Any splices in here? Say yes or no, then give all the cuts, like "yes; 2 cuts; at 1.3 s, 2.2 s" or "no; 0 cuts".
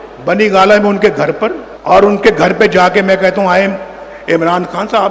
yes; 1 cut; at 1.7 s